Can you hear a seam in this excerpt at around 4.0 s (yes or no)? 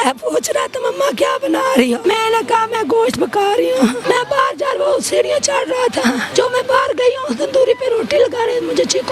yes